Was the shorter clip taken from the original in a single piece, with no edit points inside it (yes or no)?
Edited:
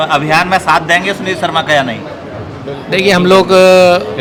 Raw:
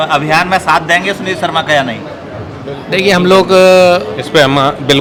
yes